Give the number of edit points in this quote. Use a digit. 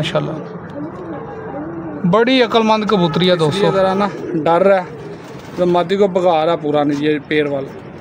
1